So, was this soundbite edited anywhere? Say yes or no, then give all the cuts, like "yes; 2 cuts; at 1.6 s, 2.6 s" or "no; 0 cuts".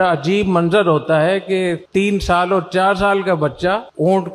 no; 0 cuts